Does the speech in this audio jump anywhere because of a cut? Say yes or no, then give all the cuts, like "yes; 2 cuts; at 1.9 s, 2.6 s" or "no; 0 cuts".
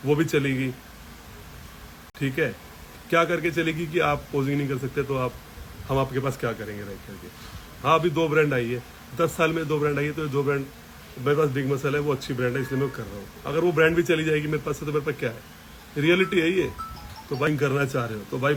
no; 0 cuts